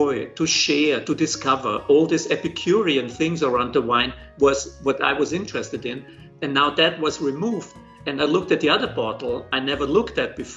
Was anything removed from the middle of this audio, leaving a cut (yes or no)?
no